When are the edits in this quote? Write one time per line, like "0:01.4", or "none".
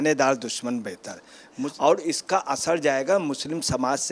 0:01.6